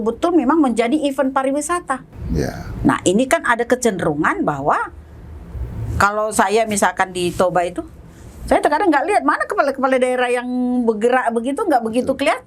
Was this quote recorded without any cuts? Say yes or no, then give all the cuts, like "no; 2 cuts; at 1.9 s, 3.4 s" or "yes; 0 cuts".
no; 1 cut; at 2.1 s